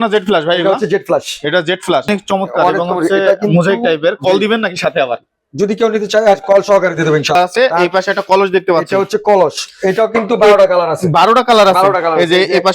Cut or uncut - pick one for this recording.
cut